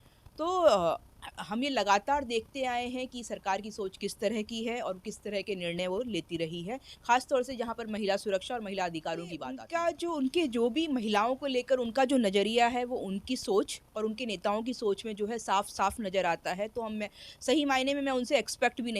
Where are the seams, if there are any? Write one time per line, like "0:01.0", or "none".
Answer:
0:09.6